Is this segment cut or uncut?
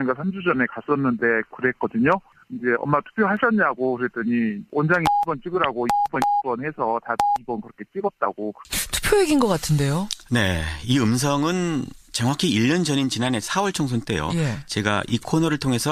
uncut